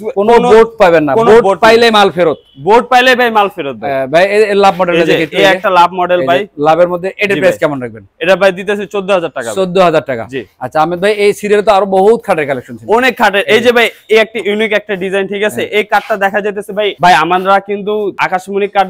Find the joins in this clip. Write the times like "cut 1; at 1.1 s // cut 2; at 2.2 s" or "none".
none